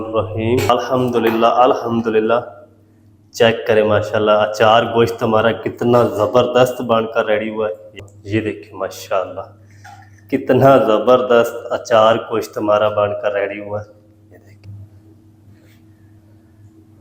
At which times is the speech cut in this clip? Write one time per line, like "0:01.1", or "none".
0:00.7
0:07.9
0:14.7